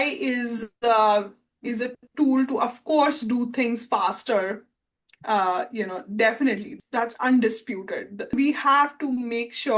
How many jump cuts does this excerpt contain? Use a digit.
2